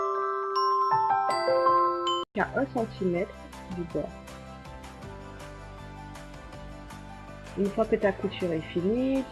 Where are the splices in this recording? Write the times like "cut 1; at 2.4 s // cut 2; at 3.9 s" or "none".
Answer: none